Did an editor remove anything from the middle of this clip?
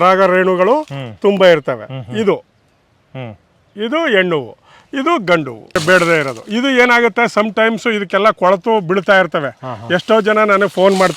yes; 1 cut; at 5.8 s

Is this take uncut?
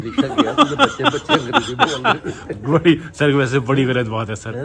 yes; 0 cuts

